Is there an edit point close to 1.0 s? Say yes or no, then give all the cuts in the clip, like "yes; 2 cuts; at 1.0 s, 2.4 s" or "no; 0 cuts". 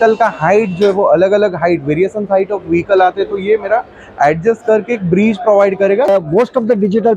no; 1 cut; at 6.1 s